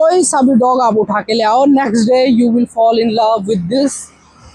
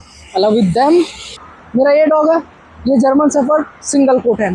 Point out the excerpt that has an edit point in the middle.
second; 1 cut; at 1.3 s

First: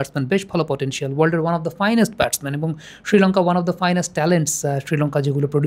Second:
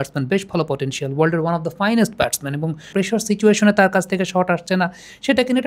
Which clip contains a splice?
second; 1 cut; at 2.9 s

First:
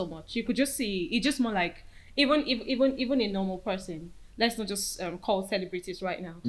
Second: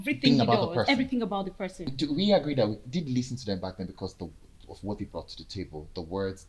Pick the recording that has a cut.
second; 1 cut; at 1.9 s

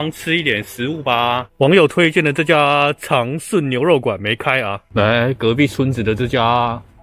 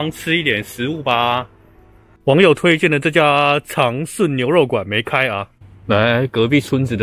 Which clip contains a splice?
first; 2 cuts; at 1.5 s, 4.8 s

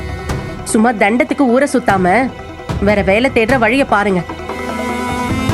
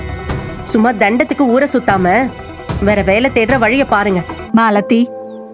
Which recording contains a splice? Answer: second; 1 cut; at 4.4 s

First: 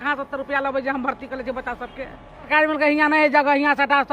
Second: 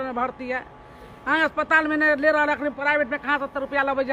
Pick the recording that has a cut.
first; 1 cut; at 2.5 s

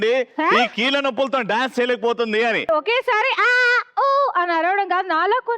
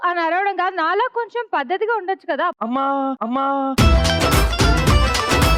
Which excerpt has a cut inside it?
first; 1 cut; at 2.7 s

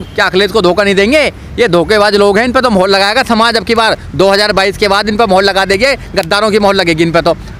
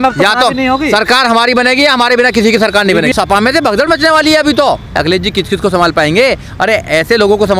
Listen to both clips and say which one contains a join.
second; 2 cuts; at 3.1 s, 5.0 s

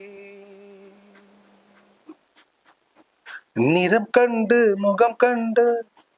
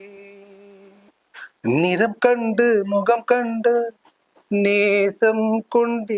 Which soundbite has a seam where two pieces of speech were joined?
second; 1 cut; at 1.1 s

